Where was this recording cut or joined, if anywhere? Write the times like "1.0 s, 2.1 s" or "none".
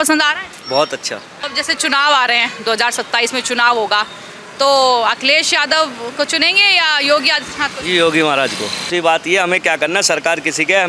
1.4 s, 8.9 s